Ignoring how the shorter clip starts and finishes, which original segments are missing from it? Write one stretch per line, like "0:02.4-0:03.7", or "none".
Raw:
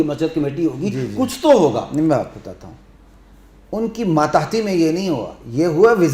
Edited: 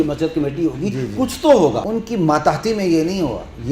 0:01.8-0:03.7